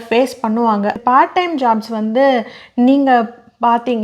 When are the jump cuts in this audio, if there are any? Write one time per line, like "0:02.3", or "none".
0:01.0